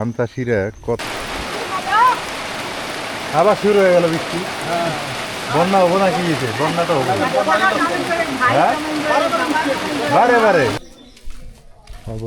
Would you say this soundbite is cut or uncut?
cut